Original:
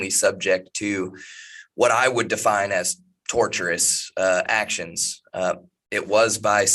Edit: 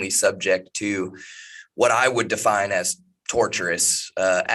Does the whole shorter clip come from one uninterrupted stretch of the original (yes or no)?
yes